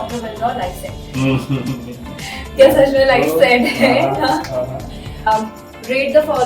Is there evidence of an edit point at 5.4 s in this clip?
yes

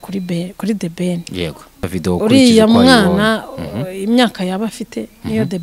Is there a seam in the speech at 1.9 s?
yes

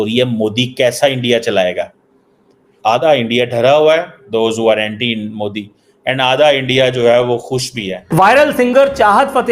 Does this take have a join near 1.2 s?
yes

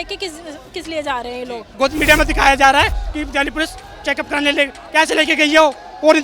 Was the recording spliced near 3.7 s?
no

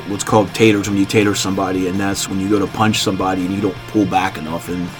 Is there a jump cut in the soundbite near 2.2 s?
yes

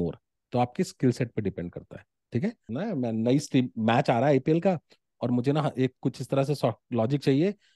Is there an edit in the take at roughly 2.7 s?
yes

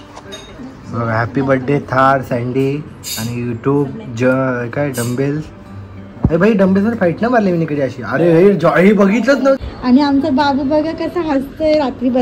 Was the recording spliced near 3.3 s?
no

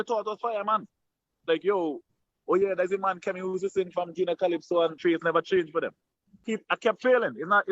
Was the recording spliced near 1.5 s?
yes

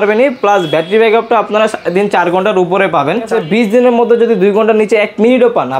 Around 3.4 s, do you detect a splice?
yes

